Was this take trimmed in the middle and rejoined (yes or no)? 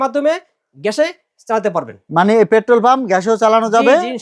no